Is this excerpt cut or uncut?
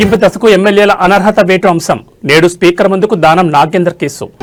uncut